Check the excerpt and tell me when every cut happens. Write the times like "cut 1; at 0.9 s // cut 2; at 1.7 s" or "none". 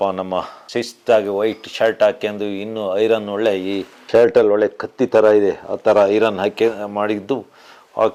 none